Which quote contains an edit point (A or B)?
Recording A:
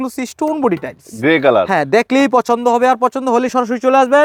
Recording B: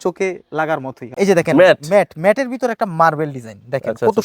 B